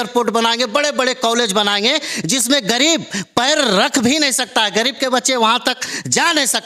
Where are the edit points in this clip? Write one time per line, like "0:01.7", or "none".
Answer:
none